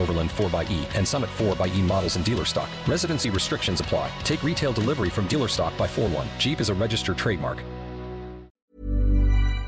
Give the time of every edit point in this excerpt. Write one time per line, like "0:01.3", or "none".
0:08.5